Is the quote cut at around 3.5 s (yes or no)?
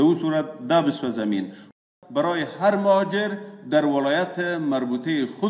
no